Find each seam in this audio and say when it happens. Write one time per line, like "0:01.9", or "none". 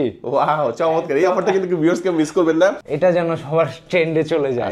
0:02.9